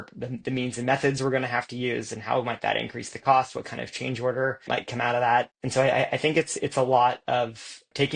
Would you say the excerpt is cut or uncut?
cut